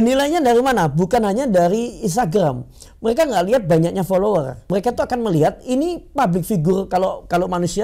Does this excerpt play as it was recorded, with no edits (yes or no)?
no